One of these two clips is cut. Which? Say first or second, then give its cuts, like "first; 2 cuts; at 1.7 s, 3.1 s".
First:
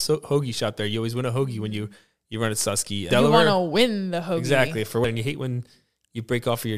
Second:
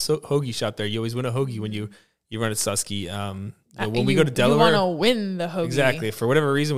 first; 2 cuts; at 3.1 s, 5.0 s